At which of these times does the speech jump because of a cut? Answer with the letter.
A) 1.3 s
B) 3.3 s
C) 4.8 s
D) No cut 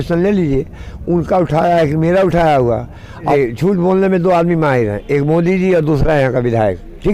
B